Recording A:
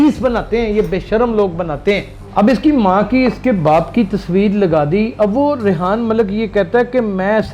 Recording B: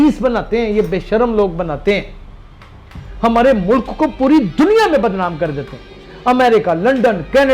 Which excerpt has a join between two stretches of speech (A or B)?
A